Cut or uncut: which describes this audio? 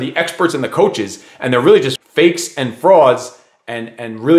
cut